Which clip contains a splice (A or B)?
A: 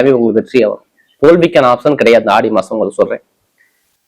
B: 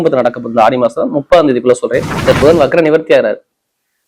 B